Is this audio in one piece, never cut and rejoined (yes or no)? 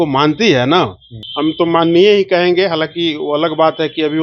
no